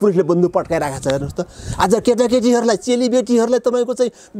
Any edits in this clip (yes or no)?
no